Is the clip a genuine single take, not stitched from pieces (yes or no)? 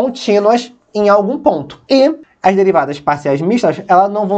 no